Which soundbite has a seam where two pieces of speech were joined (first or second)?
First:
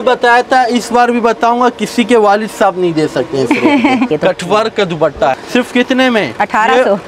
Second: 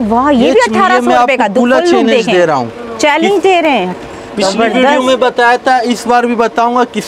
first